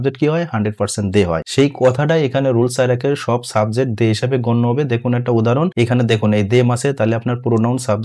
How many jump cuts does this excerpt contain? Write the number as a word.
two